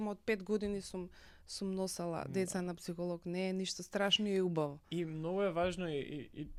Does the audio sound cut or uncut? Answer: uncut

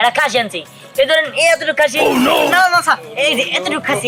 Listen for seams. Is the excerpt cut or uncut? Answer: uncut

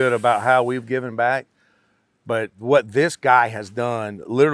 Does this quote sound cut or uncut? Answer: cut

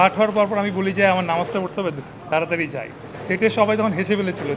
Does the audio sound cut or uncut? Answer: cut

